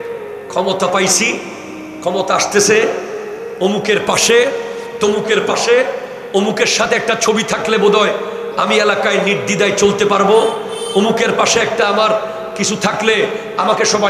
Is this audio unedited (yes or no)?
yes